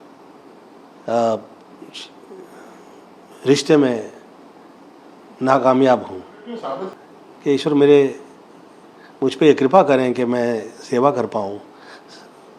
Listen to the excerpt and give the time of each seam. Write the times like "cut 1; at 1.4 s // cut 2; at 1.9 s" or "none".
cut 1; at 6.9 s